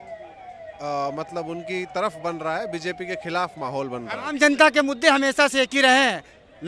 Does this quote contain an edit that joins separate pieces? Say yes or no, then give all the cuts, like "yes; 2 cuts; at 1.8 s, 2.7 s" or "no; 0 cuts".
yes; 1 cut; at 4.2 s